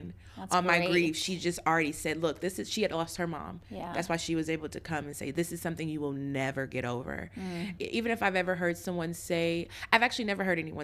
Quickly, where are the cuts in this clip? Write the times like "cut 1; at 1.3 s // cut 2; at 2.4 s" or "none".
cut 1; at 7.7 s